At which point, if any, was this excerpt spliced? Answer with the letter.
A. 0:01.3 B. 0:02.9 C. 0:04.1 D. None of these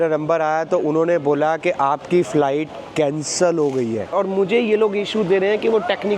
C